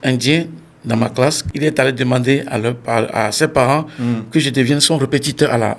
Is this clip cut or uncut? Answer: cut